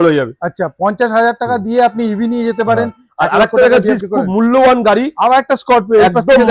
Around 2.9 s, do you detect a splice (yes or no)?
no